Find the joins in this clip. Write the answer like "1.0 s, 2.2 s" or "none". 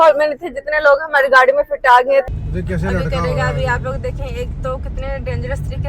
2.3 s